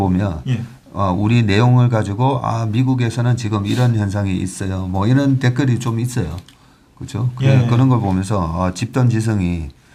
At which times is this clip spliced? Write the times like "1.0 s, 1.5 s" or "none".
none